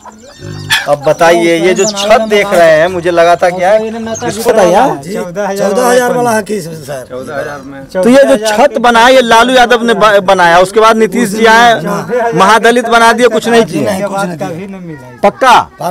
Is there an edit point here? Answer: yes; 1 cut; at 4.5 s

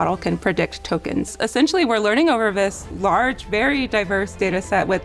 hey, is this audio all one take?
no; 1 cut; at 1.3 s

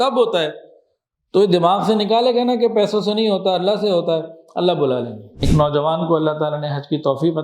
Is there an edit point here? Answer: yes; 1 cut; at 5.3 s

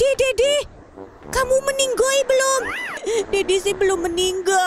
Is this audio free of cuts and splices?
no; 1 cut; at 3.0 s

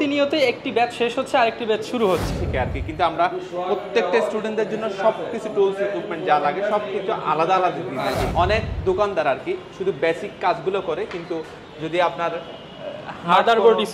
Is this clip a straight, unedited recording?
no; 2 cuts; at 2.3 s, 8.3 s

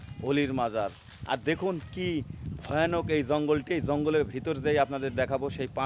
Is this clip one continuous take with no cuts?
yes; 0 cuts

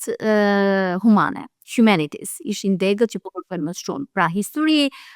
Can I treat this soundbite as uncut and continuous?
yes; 0 cuts

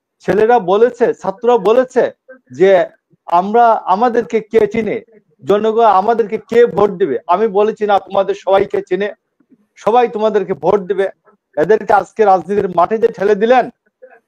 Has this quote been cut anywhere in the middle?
no; 0 cuts

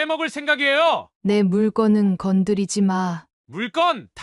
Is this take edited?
yes; 1 cut; at 1.1 s

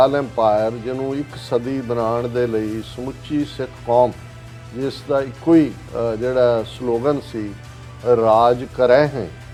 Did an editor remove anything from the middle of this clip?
no; 0 cuts

